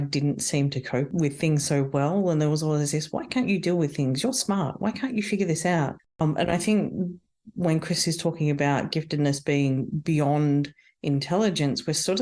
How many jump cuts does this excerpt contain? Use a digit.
2